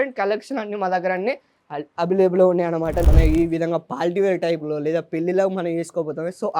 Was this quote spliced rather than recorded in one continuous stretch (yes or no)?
yes